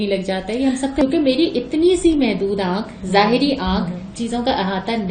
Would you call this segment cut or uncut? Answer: cut